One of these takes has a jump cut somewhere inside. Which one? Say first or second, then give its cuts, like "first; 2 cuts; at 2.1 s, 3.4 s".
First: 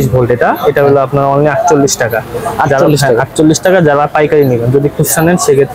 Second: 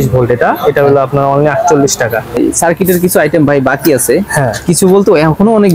second; 1 cut; at 2.4 s